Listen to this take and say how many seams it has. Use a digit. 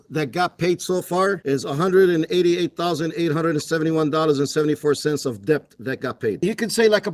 0